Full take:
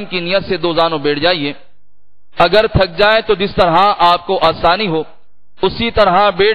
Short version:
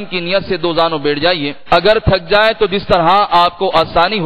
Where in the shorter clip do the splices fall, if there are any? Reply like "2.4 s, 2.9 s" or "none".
1.5 s